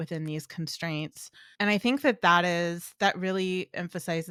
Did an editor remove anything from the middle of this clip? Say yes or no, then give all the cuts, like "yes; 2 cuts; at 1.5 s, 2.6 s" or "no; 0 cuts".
no; 0 cuts